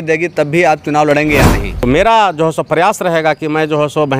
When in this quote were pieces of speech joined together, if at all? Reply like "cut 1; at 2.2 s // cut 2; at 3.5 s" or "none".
cut 1; at 1.7 s

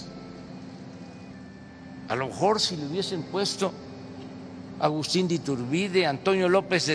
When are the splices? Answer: cut 1; at 1.6 s

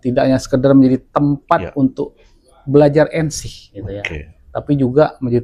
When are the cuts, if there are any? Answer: none

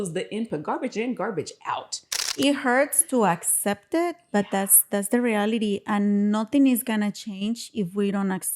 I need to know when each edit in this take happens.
cut 1; at 2.2 s

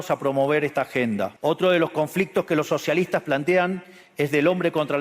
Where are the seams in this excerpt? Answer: cut 1; at 1.3 s

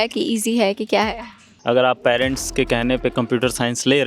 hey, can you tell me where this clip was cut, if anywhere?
cut 1; at 1.5 s

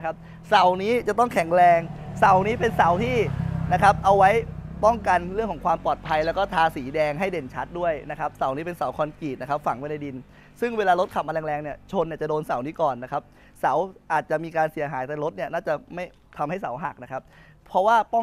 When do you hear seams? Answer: none

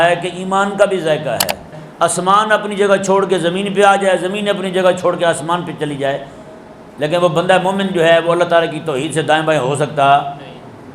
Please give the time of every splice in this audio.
cut 1; at 1.8 s

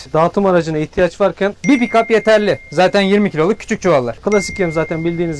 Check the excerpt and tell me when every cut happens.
cut 1; at 1.6 s // cut 2; at 4.2 s

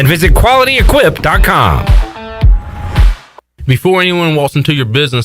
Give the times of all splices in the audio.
cut 1; at 3.5 s

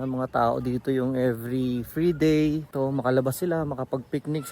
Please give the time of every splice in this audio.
cut 1; at 2.7 s

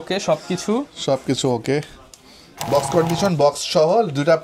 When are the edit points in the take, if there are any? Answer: cut 1; at 2.7 s

